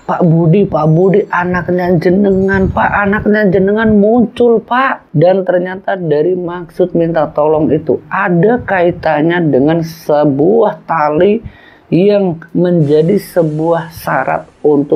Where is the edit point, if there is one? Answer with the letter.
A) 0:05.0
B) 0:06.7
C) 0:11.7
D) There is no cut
A